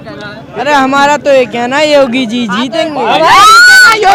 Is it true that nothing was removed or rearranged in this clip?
yes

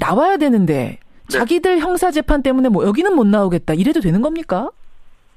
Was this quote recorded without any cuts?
yes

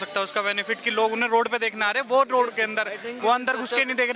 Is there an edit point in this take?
no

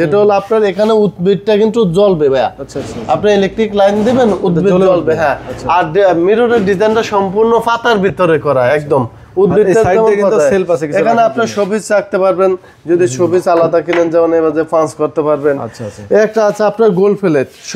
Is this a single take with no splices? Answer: yes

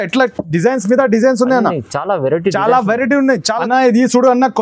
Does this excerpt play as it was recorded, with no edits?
no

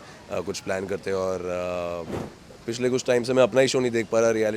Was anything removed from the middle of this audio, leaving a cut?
yes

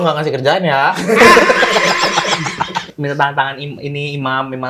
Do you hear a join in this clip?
yes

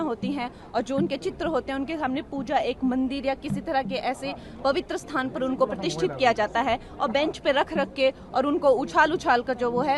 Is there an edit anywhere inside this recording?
no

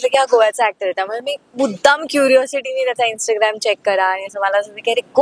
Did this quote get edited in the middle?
no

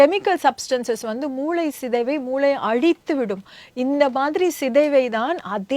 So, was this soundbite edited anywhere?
no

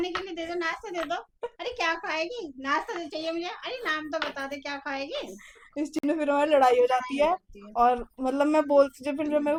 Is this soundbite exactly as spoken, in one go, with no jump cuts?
yes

